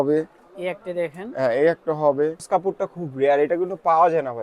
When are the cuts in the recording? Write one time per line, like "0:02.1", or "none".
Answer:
0:02.4